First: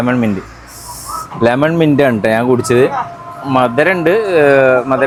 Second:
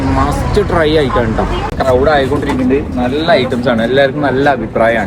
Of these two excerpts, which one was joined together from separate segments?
second; 1 cut; at 1.7 s

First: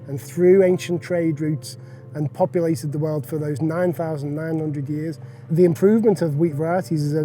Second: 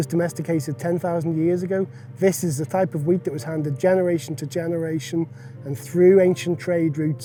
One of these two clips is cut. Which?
first; 1 cut; at 5.5 s

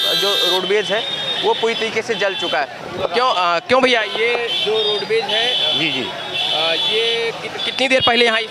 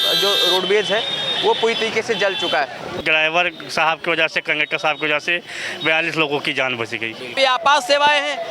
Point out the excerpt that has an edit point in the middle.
second; 2 cuts; at 2.9 s, 7.3 s

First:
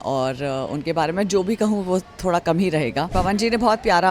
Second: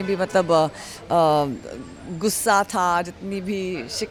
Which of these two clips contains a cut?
first; 1 cut; at 3.1 s

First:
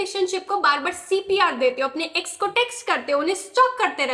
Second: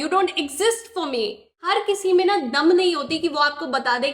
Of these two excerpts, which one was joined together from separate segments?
second; 1 cut; at 1.6 s

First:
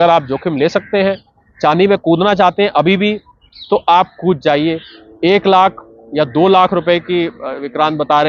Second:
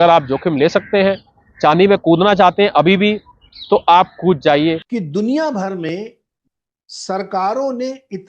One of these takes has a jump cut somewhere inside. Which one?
second; 1 cut; at 4.9 s

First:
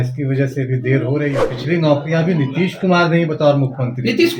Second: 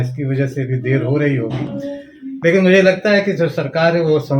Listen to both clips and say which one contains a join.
first; 1 cut; at 1.5 s

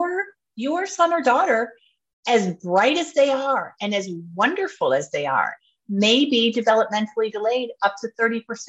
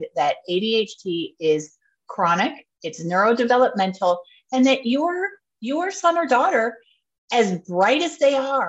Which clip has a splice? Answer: first; 1 cut; at 5.6 s

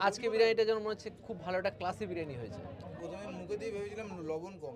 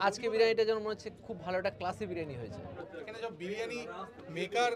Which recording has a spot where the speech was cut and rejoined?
second; 1 cut; at 2.8 s

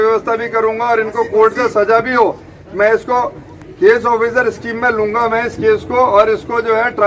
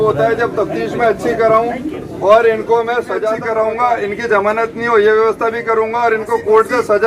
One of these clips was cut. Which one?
second; 1 cut; at 3.3 s

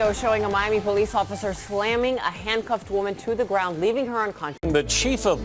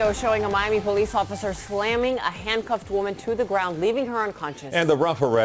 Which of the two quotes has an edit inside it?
first; 1 cut; at 4.5 s

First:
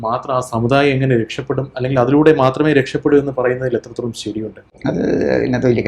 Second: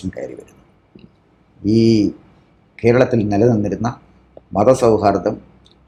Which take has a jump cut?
first; 1 cut; at 4.7 s

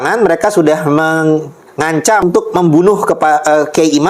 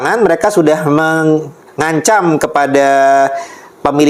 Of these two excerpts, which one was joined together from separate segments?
first; 1 cut; at 2.1 s

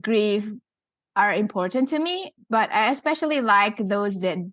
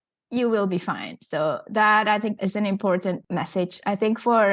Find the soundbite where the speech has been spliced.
second; 2 cuts; at 2.4 s, 3.2 s

